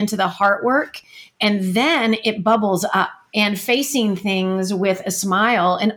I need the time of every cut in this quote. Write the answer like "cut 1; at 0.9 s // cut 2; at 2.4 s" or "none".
cut 1; at 3.2 s